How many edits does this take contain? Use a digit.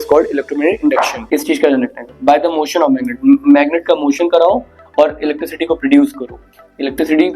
1